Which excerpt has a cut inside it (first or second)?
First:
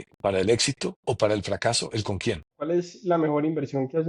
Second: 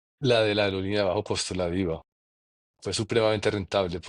first